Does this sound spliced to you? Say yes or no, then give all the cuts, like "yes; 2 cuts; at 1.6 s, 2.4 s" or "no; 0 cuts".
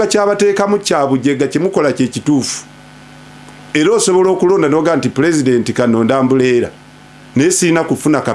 no; 0 cuts